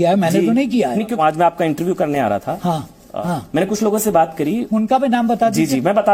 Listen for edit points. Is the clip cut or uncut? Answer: cut